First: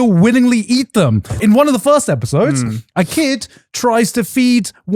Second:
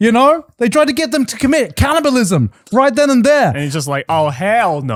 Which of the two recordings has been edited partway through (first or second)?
first